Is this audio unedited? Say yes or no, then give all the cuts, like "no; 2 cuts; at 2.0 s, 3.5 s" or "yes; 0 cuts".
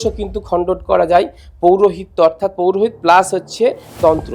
yes; 0 cuts